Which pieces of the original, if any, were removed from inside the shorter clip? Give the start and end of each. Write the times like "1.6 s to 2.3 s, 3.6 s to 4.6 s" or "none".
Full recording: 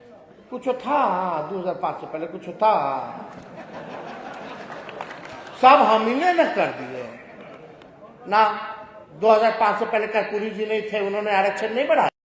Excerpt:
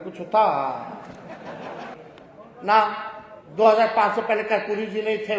4.2 s to 7.6 s